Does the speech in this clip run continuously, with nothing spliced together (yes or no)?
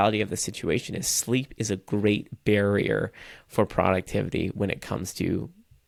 yes